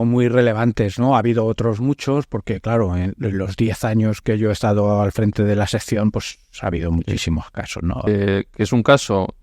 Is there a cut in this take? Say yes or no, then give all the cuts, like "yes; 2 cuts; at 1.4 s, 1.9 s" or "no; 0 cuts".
yes; 1 cut; at 8.1 s